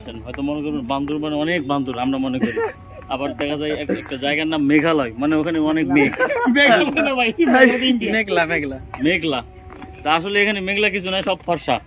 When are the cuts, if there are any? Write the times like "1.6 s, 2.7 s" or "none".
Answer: none